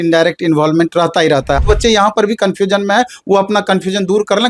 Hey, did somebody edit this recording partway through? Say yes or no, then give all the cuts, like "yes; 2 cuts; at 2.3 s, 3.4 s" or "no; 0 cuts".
yes; 1 cut; at 1.6 s